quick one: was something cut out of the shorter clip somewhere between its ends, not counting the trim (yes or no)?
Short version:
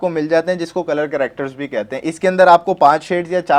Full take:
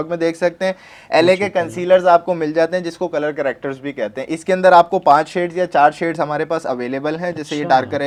no